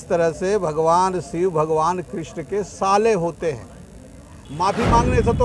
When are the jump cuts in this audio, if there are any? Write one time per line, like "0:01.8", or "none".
0:04.4

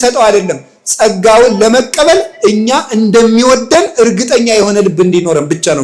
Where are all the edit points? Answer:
none

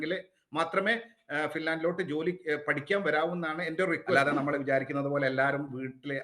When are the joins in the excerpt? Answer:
0:04.2

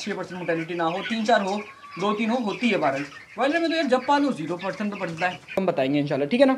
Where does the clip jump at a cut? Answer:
0:05.6

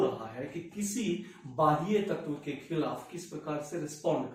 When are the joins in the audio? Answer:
none

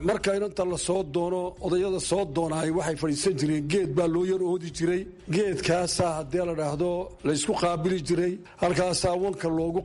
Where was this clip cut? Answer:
0:05.2
0:08.5

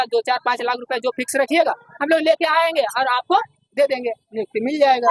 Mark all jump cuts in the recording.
none

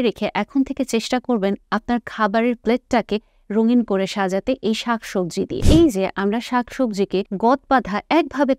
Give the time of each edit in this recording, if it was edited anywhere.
0:05.6
0:07.3

